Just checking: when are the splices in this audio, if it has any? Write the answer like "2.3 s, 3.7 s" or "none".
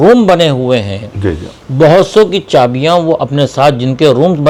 none